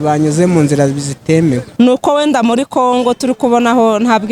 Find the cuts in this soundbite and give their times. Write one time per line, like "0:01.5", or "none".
0:01.7